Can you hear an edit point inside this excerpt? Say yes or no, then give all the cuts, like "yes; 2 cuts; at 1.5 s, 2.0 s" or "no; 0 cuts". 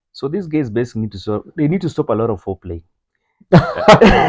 no; 0 cuts